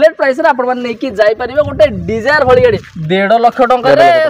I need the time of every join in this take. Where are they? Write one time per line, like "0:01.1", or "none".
0:02.9